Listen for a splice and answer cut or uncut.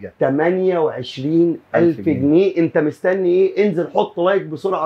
uncut